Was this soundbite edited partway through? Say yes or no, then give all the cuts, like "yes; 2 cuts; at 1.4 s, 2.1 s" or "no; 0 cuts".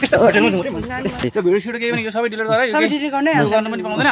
yes; 1 cut; at 1.2 s